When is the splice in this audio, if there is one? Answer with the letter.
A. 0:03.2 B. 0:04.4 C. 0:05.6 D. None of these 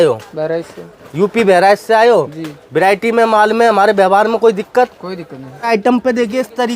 C